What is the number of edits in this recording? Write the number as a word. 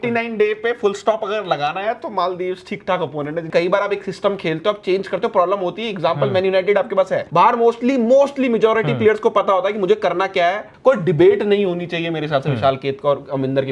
three